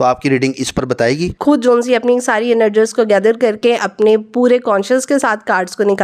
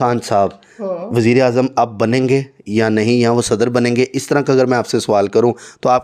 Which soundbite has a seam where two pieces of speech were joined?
first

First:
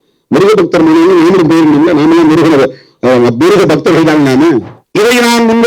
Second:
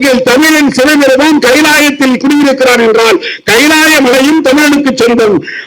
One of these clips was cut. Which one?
first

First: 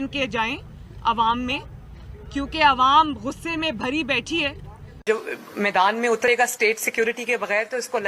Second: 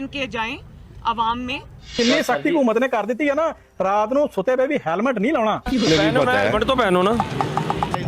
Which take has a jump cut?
second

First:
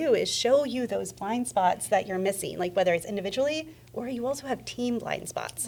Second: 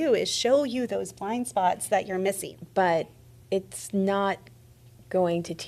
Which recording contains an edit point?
second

